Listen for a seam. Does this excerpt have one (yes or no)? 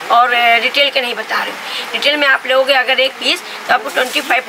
no